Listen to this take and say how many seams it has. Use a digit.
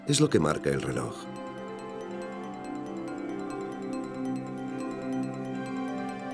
1